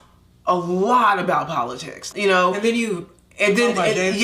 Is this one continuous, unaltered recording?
no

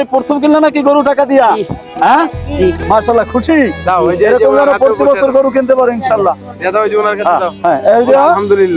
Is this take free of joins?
no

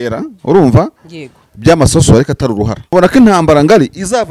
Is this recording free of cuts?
no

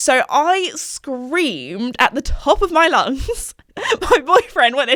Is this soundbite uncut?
yes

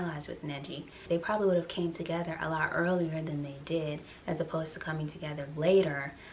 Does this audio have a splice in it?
no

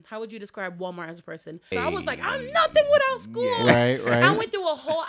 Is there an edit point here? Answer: yes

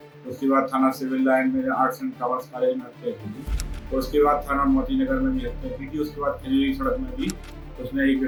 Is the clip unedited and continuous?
yes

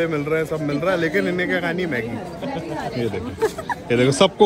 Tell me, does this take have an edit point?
no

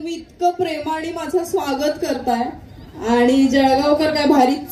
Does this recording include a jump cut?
no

